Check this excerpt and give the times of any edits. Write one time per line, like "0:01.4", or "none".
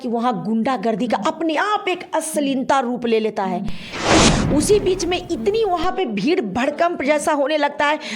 0:04.3